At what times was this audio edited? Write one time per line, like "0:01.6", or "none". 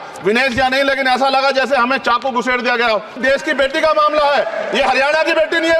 0:03.2